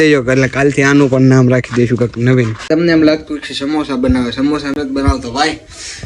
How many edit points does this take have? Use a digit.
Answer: 0